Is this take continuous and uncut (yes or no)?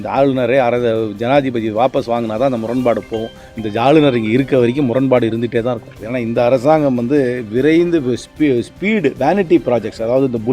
no